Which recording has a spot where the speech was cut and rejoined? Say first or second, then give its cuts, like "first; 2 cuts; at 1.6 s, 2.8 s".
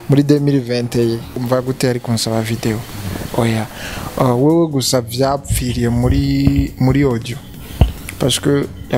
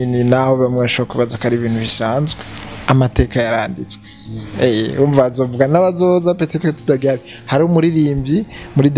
first; 1 cut; at 1.4 s